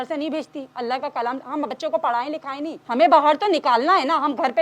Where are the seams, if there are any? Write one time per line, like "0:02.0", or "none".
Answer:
0:02.8